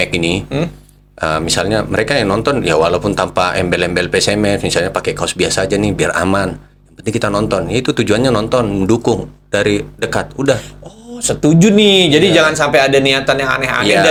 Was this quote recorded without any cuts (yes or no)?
yes